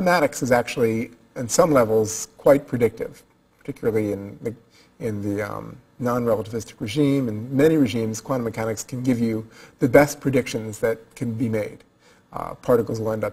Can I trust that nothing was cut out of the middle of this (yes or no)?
no